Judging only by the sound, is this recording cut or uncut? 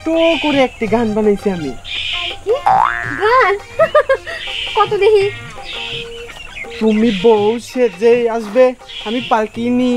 uncut